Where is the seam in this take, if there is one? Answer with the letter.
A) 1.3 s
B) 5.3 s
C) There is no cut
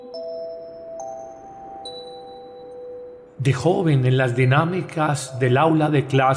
B